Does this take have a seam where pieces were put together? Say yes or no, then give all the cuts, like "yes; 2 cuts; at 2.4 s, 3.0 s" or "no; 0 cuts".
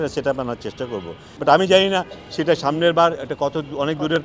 yes; 1 cut; at 1.3 s